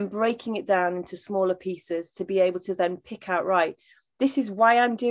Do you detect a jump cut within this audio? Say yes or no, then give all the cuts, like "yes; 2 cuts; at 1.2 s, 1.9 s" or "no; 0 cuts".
no; 0 cuts